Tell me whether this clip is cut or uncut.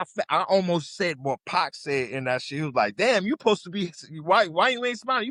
uncut